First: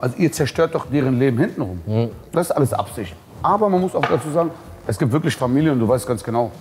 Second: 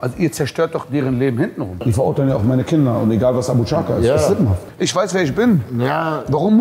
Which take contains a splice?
second; 2 cuts; at 1.8 s, 4.6 s

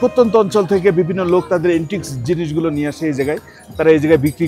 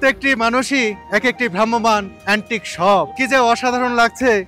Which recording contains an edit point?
second; 3 cuts; at 1.0 s, 2.1 s, 3.2 s

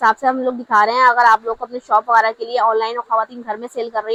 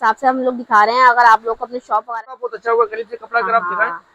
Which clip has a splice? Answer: second; 1 cut; at 2.4 s

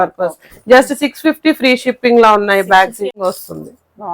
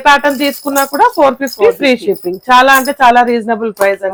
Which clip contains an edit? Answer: first; 1 cut; at 3.2 s

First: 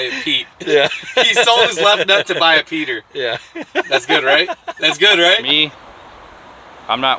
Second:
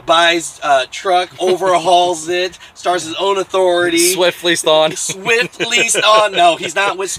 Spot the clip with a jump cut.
first; 1 cut; at 5.5 s

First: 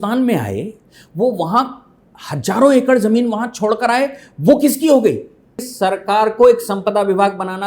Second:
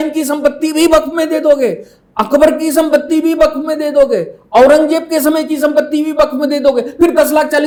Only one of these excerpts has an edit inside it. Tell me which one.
first; 1 cut; at 5.7 s

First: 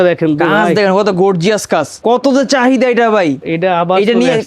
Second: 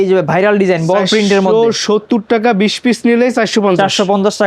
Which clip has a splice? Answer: first; 2 cuts; at 1.9 s, 3.5 s

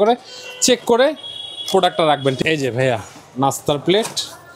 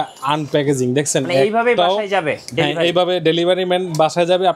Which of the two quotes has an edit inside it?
first; 1 cut; at 2.4 s

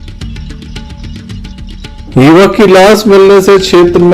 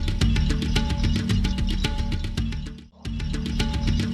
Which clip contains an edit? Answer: first; 1 cut; at 2.0 s

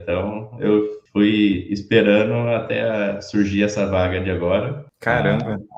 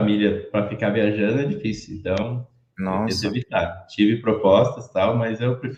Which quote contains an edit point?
first; 2 cuts; at 1.0 s, 4.9 s

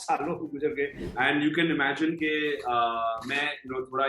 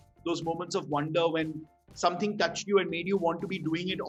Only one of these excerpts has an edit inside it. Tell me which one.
first; 1 cut; at 1.0 s

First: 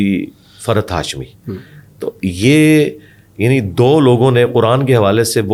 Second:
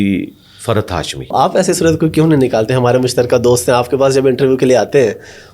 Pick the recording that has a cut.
second; 1 cut; at 1.3 s

